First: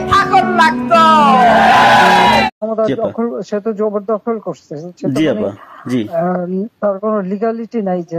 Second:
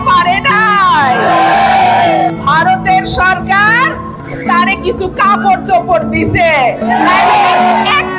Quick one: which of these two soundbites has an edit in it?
first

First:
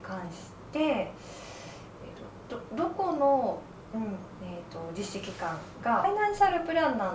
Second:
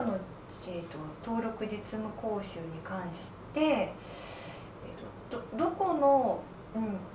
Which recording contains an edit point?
first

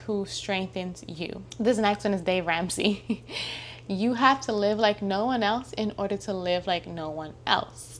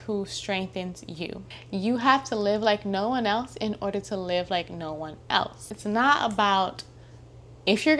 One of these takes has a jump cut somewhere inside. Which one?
second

